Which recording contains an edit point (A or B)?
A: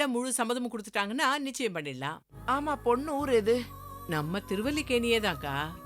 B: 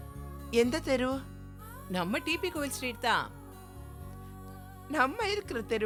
A